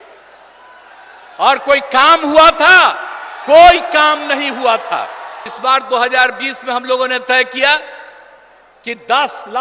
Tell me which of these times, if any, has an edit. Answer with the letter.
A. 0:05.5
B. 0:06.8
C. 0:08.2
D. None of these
A